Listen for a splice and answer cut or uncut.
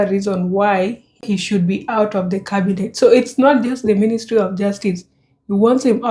cut